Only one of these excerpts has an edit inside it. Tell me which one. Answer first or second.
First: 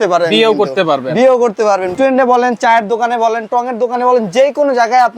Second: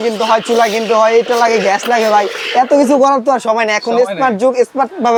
first